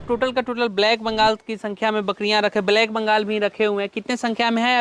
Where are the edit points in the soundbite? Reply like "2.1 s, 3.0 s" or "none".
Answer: none